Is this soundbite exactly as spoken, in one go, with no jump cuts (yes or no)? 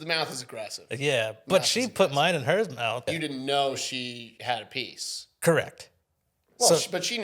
no